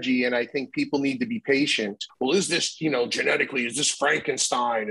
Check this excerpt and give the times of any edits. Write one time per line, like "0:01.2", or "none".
0:02.0